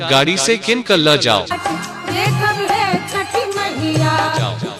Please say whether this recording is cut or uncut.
uncut